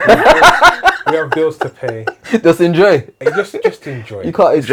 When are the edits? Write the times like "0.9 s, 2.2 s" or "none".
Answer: none